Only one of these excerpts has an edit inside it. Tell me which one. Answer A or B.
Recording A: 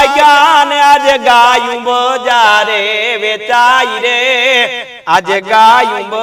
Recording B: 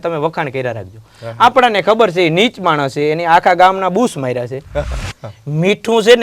B